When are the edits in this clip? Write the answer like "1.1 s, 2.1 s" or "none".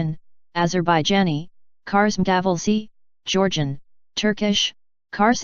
none